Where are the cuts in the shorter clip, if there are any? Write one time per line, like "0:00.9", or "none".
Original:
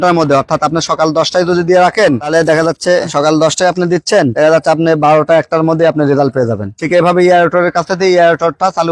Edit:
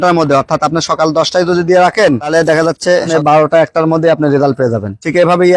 0:03.1